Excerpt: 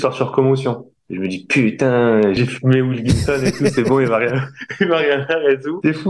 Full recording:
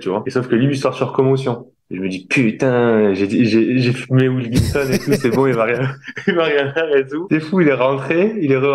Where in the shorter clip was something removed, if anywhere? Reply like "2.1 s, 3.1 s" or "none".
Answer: 2.4 s